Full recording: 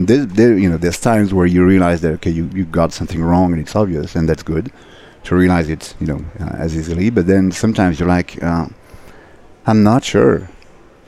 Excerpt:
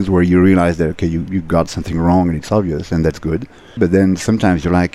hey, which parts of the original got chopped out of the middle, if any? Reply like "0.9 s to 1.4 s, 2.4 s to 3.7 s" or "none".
5.0 s to 7.1 s